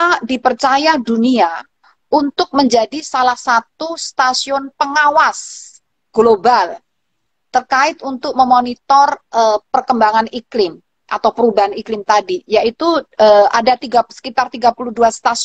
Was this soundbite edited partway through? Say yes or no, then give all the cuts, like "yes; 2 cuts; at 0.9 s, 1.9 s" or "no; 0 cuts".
no; 0 cuts